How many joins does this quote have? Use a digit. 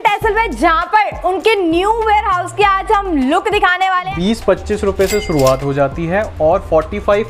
1